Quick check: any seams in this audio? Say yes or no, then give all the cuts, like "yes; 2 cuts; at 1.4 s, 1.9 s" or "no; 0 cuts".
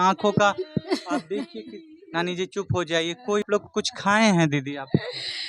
yes; 1 cut; at 3.5 s